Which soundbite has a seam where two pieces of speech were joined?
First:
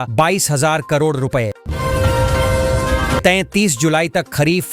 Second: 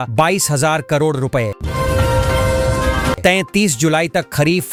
first; 2 cuts; at 1.7 s, 3.2 s

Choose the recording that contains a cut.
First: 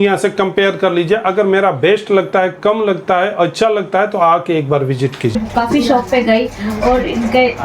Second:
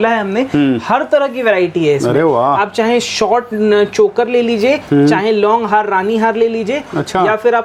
first; 1 cut; at 5.4 s

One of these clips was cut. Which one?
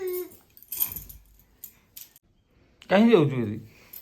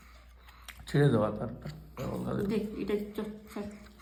first; 1 cut; at 2.2 s

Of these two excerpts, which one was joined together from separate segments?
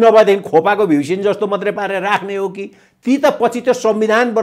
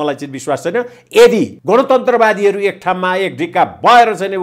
second; 1 cut; at 1.5 s

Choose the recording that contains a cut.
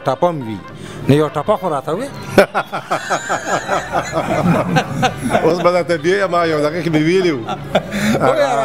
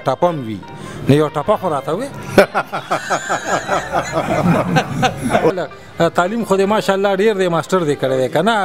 second; 1 cut; at 5.5 s

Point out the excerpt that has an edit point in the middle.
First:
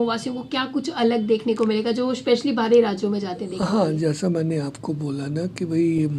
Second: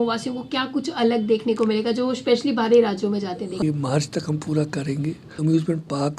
second; 2 cuts; at 3.6 s, 5.4 s

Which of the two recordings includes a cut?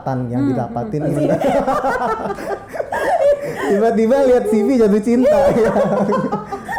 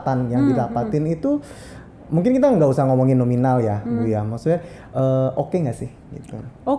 first; 1 cut; at 1.1 s

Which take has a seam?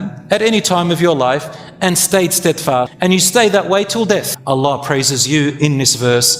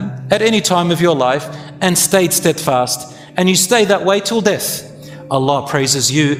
first; 2 cuts; at 2.9 s, 4.3 s

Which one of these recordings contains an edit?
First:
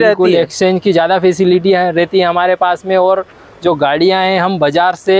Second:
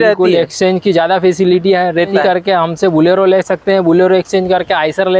second; 1 cut; at 2.1 s

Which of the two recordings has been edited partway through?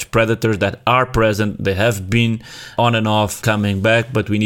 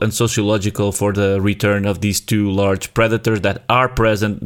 first; 1 cut; at 2.7 s

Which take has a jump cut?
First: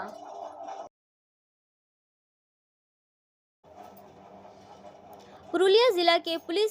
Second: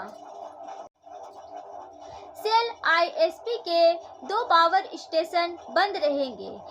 second; 1 cut; at 1.0 s

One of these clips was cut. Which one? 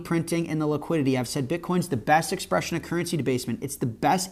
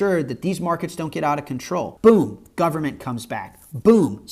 second; 1 cut; at 1.9 s

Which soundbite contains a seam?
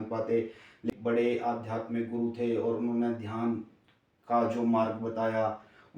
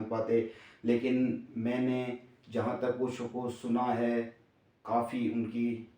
first; 1 cut; at 0.9 s

